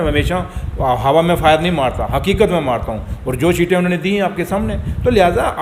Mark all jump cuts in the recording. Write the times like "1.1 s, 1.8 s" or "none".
none